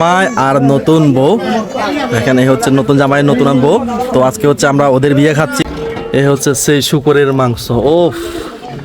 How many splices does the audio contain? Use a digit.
1